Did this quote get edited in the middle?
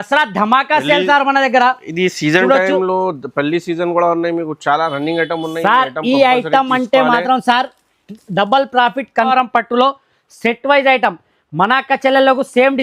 yes; 1 cut; at 9.3 s

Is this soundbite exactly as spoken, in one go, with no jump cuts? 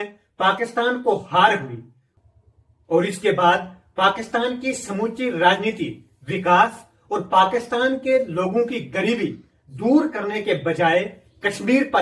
yes; 0 cuts

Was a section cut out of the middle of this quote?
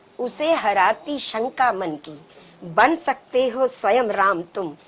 no; 0 cuts

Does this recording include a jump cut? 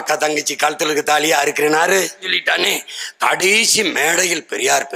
yes; 1 cut; at 2.4 s

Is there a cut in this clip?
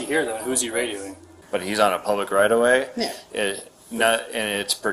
yes; 1 cut; at 1.3 s

